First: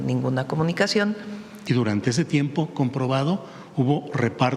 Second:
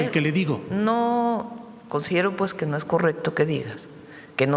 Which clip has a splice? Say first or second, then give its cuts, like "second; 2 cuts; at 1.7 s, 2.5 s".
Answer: first; 1 cut; at 1.5 s